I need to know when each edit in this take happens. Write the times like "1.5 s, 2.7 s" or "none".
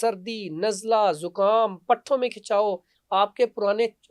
none